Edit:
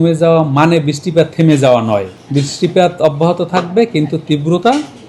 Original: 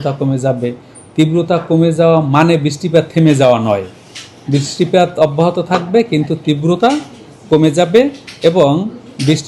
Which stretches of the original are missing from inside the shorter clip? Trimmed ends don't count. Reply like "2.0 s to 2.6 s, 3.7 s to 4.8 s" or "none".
3.9 s to 4.3 s

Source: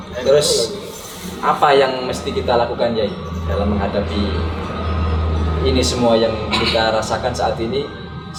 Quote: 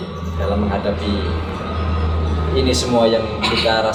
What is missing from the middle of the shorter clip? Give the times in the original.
none

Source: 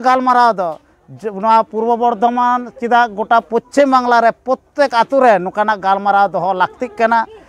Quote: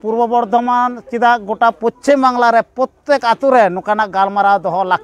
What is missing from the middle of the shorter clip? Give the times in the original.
none

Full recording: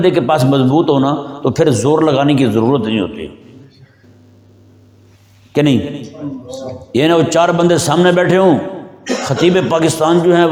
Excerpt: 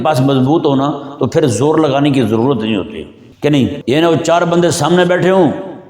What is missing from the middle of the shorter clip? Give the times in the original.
3.9 s to 6.7 s

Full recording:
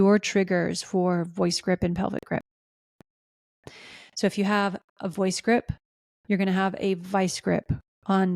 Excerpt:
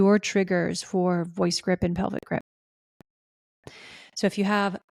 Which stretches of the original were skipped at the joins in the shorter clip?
none

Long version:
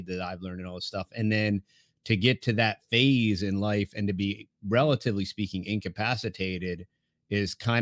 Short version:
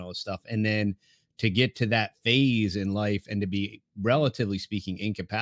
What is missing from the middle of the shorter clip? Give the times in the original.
none

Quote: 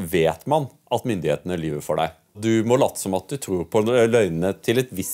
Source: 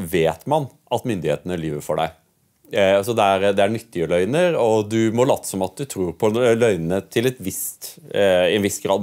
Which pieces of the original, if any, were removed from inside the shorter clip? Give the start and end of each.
2.4 s to 4.9 s

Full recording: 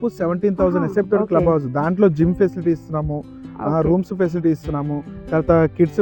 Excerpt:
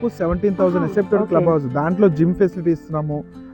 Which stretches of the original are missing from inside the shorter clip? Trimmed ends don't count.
none

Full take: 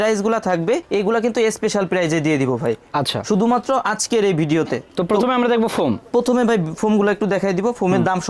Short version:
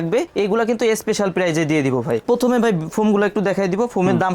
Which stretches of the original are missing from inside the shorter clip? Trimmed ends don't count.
2.8 s to 6.1 s

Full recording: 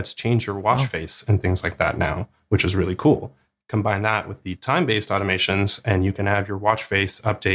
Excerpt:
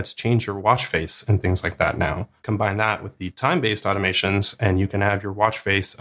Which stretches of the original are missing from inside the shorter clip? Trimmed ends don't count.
2.3 s to 3.5 s

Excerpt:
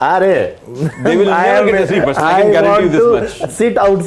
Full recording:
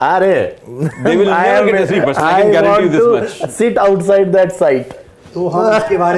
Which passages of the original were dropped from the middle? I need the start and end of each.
none

